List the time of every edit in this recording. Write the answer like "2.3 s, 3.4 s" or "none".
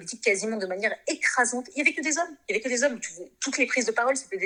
none